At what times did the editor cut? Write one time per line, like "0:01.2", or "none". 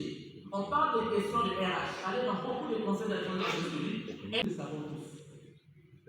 0:04.4